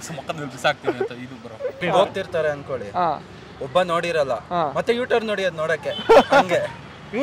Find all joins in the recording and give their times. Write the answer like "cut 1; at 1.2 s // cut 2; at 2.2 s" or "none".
cut 1; at 1.9 s